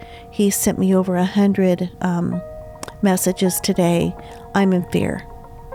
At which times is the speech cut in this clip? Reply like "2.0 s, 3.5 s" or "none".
none